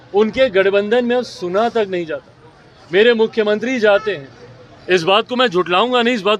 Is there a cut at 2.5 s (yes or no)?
no